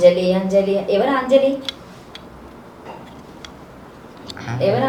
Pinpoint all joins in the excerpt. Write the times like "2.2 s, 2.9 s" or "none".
none